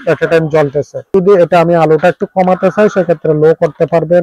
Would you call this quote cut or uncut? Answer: uncut